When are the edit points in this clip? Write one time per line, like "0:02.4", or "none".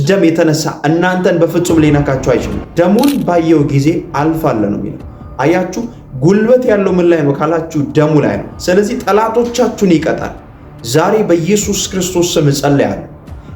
0:02.6
0:08.5